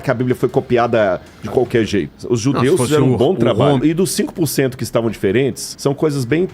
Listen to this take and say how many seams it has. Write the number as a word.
two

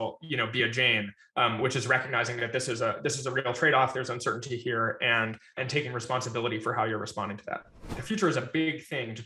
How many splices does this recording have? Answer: two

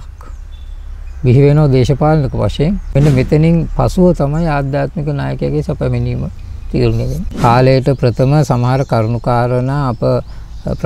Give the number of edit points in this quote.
two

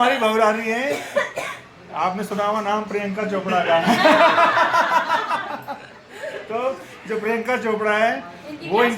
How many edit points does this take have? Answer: one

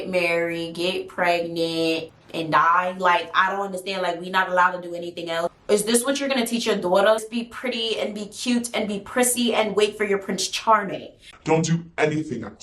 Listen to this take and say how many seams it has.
zero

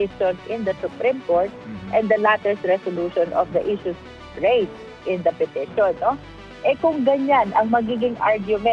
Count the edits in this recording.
zero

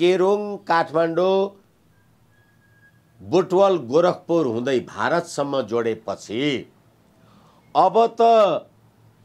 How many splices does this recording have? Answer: zero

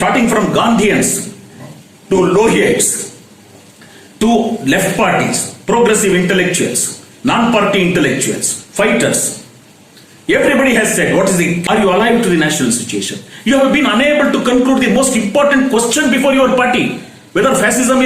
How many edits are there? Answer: one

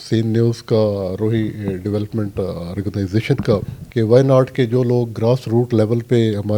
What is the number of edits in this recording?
one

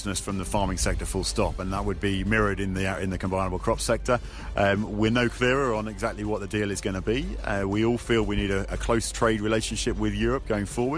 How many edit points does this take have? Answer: zero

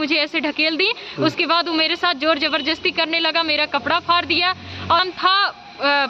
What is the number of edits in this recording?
one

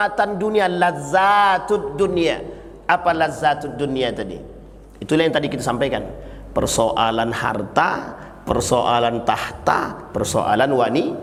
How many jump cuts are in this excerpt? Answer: zero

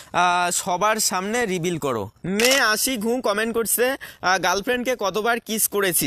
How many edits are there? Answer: one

